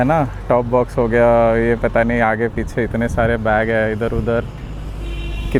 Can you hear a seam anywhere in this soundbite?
no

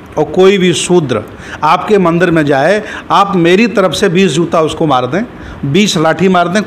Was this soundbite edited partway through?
no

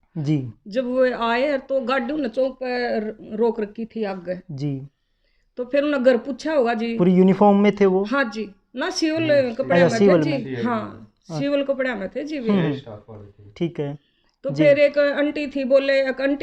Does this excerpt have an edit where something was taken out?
no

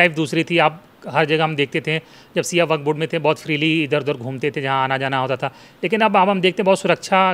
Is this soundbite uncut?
yes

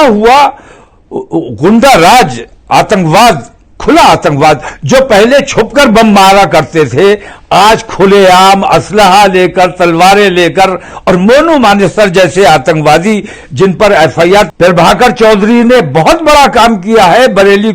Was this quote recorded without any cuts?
no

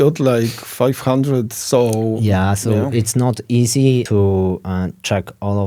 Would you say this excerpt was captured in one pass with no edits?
no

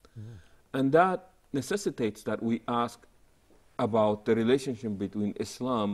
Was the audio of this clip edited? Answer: no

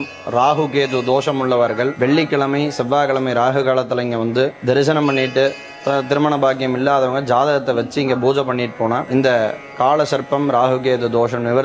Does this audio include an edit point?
yes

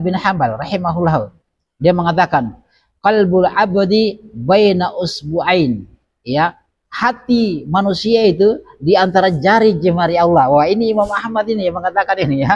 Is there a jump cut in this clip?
no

